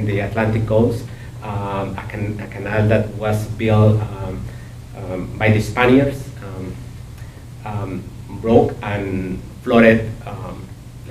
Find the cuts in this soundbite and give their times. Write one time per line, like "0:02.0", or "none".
0:10.0